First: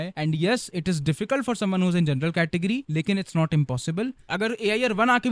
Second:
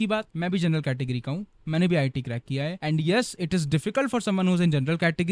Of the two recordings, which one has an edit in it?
first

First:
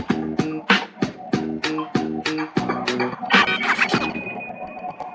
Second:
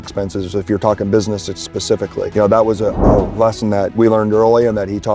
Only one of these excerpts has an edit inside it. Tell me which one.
second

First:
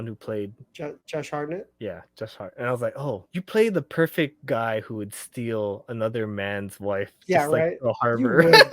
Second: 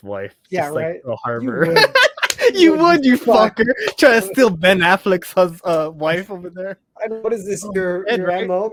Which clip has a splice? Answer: first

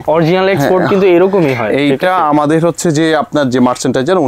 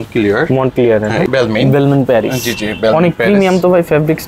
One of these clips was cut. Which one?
second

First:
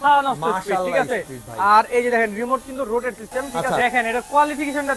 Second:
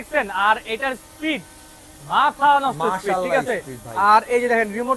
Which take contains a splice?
first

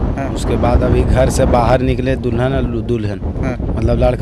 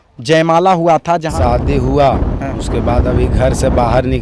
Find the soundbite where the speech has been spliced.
second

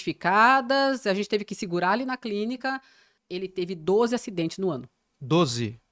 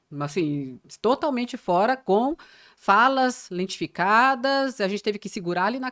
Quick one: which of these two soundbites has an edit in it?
first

